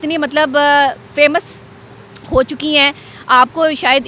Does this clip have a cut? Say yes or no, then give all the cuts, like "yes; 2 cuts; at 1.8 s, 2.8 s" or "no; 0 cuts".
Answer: no; 0 cuts